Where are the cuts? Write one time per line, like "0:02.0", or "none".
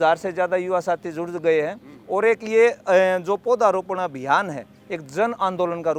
none